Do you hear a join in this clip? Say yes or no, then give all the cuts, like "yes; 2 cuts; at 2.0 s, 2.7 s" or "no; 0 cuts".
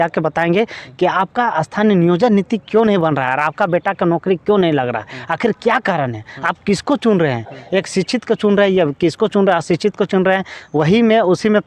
no; 0 cuts